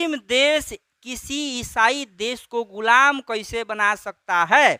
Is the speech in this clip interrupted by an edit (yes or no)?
no